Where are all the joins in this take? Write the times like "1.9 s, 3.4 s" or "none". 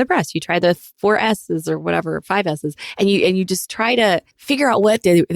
4.3 s